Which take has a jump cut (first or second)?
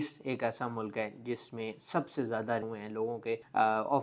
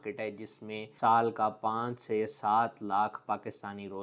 first